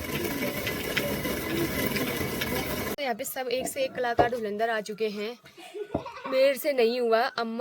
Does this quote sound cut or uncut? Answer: cut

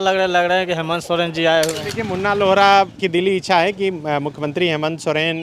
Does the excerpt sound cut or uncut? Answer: cut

